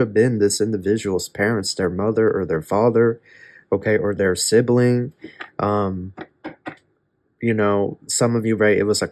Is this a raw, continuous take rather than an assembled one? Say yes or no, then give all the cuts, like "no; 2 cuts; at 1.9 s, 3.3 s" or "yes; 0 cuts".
yes; 0 cuts